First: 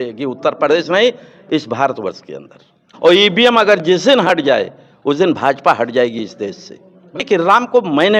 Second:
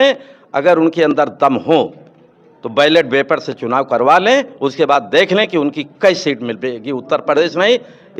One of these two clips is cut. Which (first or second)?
first